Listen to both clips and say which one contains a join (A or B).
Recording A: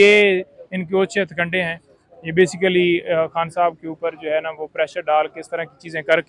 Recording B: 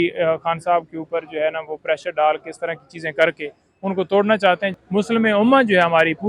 B